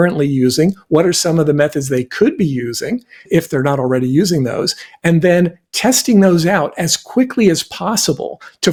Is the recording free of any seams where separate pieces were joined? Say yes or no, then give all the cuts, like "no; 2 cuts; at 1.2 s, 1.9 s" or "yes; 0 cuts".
yes; 0 cuts